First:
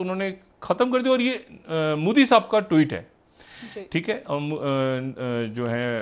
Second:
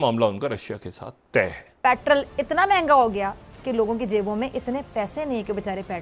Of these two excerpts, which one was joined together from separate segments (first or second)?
second